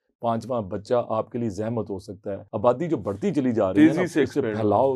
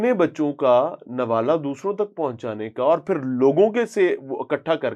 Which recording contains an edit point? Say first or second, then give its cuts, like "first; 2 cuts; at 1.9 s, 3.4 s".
first; 1 cut; at 2.4 s